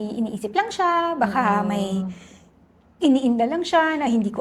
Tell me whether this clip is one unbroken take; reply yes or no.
yes